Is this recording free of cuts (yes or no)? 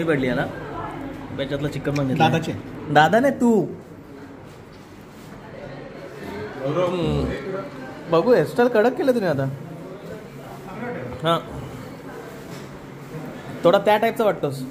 yes